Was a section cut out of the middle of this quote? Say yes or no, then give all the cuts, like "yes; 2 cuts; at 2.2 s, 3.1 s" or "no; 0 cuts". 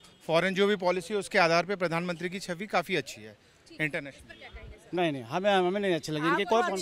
no; 0 cuts